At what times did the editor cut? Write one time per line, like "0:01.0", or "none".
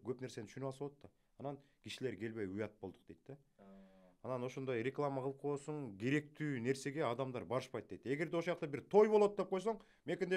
none